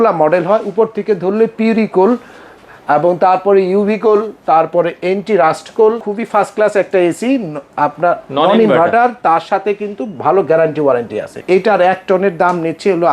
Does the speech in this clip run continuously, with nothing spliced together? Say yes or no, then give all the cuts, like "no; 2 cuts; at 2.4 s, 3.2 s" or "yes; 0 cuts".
no; 2 cuts; at 6.1 s, 11.4 s